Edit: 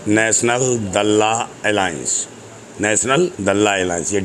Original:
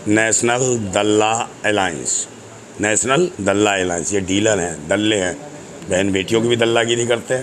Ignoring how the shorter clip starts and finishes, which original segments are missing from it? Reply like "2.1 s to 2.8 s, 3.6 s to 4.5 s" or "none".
none